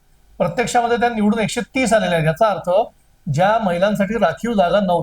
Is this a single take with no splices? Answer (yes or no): yes